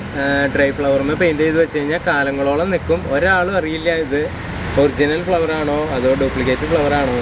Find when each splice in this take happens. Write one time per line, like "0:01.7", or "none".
none